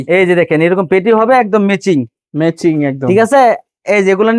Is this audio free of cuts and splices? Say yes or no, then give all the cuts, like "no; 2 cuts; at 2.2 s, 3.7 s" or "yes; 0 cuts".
yes; 0 cuts